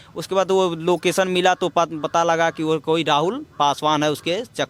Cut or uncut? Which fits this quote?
uncut